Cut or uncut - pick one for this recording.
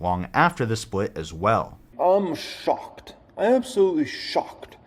cut